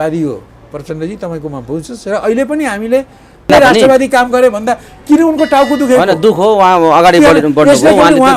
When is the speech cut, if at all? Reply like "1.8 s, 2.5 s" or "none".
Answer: 3.5 s